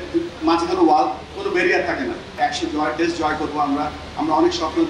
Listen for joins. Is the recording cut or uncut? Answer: cut